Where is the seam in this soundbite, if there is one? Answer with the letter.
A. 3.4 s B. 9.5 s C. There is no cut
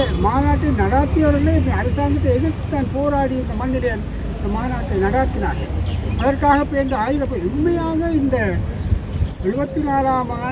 C